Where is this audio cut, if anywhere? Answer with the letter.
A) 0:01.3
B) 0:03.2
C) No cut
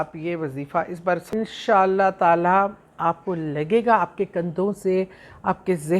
A